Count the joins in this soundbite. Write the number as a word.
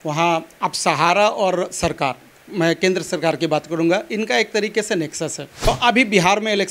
one